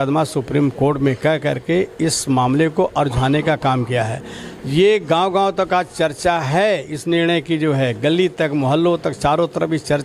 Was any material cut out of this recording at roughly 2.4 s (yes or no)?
no